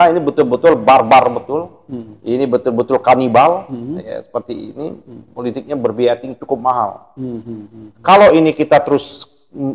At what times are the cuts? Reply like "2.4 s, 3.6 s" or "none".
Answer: none